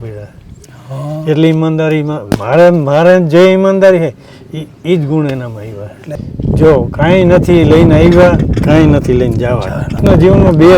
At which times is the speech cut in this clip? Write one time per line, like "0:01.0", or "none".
0:06.1
0:10.0